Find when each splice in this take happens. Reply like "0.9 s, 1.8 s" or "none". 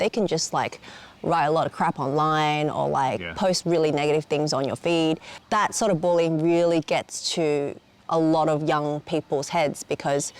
none